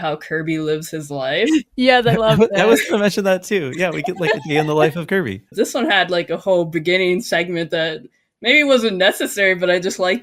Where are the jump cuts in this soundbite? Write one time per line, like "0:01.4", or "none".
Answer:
0:05.5